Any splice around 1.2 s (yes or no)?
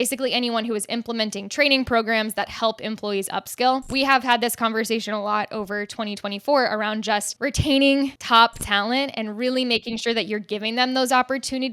no